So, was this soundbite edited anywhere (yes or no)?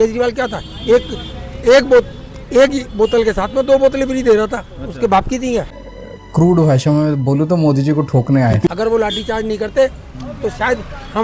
yes